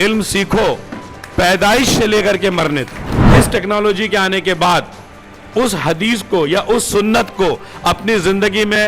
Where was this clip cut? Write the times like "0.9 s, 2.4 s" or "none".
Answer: 3.1 s